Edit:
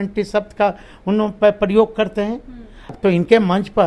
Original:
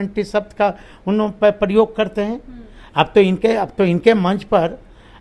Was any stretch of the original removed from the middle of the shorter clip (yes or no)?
yes